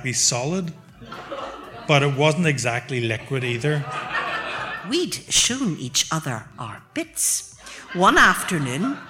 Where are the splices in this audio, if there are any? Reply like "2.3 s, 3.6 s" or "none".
4.7 s